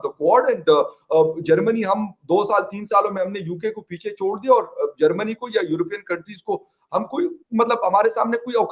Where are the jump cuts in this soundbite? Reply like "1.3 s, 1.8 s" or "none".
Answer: none